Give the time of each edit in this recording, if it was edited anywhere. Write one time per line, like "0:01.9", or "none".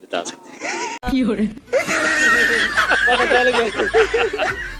0:00.9